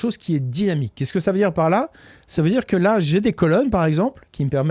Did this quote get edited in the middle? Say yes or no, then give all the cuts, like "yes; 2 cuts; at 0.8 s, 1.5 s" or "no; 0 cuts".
no; 0 cuts